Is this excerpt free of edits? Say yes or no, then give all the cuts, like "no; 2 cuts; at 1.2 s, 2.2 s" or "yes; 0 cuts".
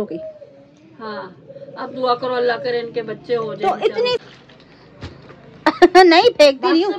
no; 1 cut; at 4.2 s